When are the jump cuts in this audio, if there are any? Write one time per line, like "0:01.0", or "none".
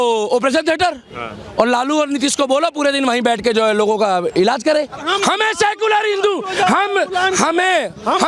0:05.0